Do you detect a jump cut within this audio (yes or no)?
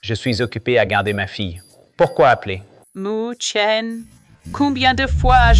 no